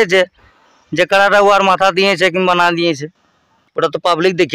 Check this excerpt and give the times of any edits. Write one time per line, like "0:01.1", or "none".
none